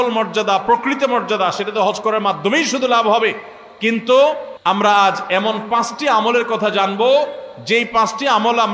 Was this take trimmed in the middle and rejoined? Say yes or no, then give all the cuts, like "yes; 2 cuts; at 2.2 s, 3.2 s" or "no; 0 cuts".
yes; 1 cut; at 4.8 s